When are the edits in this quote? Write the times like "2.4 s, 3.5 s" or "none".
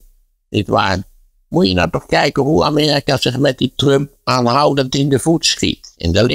none